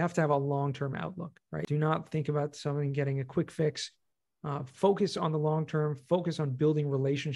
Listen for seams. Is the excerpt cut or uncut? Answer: cut